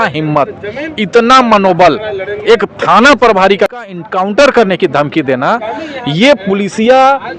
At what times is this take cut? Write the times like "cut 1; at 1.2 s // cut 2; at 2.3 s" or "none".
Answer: cut 1; at 3.7 s